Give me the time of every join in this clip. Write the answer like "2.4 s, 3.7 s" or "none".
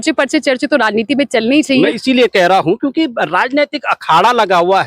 none